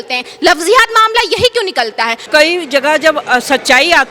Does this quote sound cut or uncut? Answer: cut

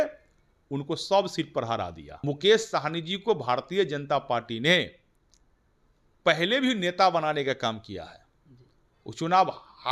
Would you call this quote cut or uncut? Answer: cut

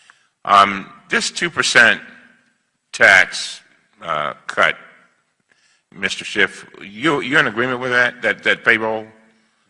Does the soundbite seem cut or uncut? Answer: cut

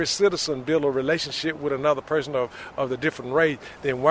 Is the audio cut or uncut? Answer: uncut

